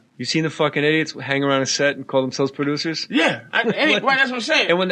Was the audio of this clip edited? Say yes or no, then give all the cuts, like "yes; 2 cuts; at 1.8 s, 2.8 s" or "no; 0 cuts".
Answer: yes; 1 cut; at 4.0 s